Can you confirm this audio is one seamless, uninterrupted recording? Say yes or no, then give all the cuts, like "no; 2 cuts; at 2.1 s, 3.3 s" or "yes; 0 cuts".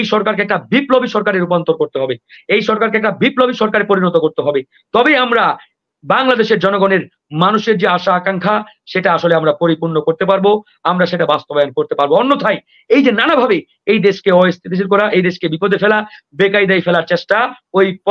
yes; 0 cuts